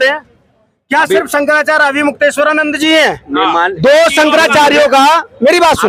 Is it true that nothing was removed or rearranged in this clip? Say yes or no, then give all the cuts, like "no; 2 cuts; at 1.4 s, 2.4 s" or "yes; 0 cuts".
yes; 0 cuts